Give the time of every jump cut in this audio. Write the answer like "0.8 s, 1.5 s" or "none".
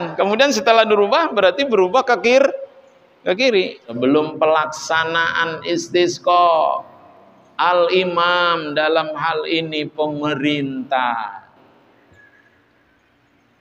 4.0 s